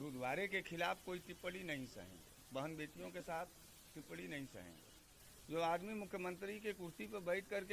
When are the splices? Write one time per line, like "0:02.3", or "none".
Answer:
0:05.1